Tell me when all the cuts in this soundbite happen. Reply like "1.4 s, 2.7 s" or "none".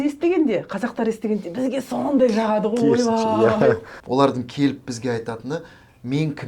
3.9 s